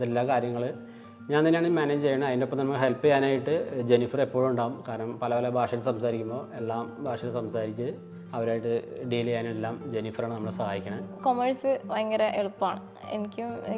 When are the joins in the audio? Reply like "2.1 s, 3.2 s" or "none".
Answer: 11.1 s